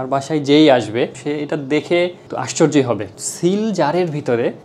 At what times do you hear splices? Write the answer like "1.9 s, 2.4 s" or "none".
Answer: 3.1 s